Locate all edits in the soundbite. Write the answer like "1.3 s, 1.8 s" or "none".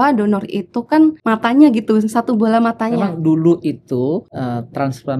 1.2 s, 2.9 s, 4.3 s